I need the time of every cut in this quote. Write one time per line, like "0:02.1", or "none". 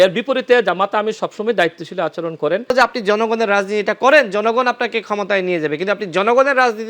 0:02.7